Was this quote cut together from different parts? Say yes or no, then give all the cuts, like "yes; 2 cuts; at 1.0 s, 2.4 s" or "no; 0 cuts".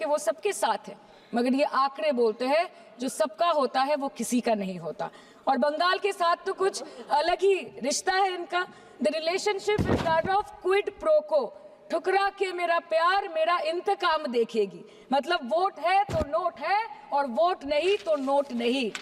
no; 0 cuts